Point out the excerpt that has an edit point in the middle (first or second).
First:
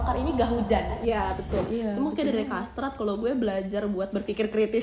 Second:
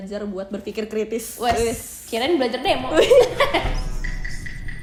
first